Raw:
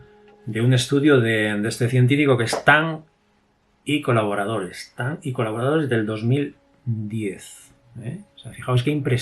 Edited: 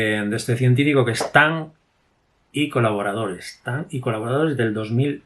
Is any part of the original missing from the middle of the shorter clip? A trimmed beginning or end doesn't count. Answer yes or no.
no